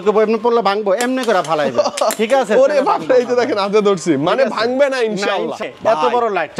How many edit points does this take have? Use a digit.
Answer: 1